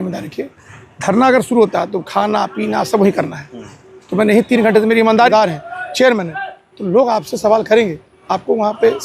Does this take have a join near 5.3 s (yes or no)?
yes